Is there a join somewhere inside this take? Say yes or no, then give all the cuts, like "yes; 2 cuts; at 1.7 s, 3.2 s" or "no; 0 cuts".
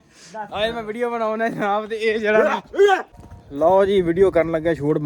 yes; 1 cut; at 3.0 s